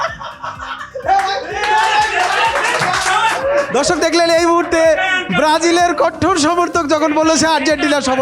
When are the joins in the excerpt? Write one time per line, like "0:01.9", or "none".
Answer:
0:03.4